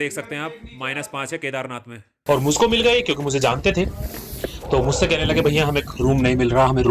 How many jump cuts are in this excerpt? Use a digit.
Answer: 1